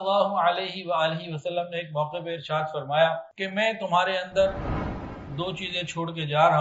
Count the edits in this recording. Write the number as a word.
one